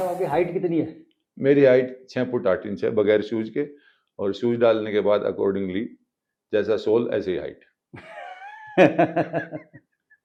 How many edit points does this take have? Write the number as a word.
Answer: zero